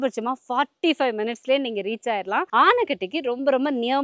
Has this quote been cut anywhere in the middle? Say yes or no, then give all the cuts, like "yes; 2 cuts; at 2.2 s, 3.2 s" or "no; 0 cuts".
yes; 1 cut; at 2.5 s